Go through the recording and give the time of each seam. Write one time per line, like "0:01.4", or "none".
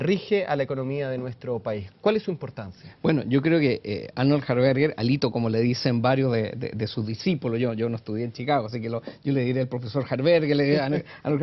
0:02.2